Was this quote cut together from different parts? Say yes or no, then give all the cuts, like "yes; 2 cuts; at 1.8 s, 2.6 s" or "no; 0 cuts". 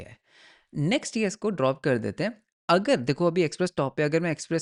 no; 0 cuts